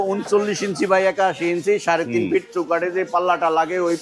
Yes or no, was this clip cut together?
no